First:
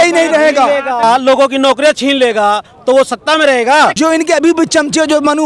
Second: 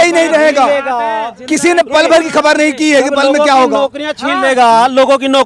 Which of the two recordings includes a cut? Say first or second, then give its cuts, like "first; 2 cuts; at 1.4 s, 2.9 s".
first; 2 cuts; at 1.0 s, 3.9 s